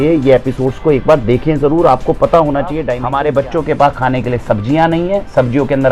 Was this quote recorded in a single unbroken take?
no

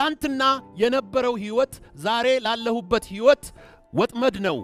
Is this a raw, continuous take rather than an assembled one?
yes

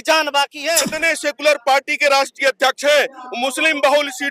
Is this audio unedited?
no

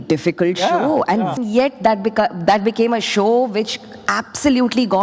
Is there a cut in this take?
yes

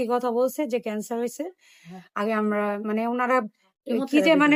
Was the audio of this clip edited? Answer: no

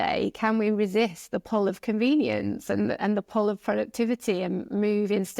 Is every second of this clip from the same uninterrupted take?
yes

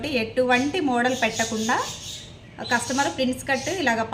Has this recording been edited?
no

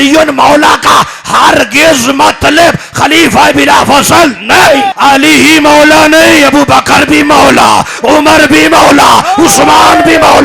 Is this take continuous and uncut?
no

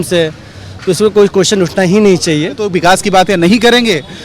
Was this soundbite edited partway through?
yes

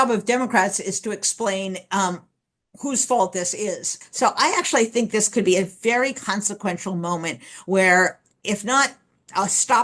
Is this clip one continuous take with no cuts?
no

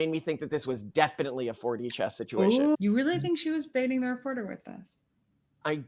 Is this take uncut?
no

